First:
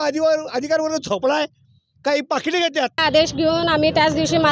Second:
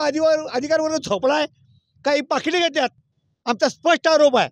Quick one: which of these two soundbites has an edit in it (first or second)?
first